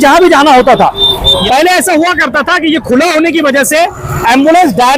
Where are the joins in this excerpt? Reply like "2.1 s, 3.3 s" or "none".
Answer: 1.4 s